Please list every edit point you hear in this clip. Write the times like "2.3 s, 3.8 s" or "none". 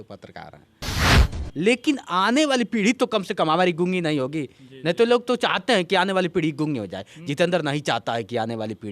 1.1 s